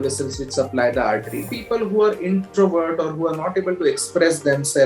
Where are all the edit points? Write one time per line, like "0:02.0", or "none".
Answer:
0:01.5